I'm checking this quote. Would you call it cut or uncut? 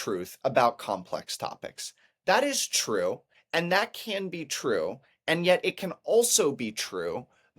cut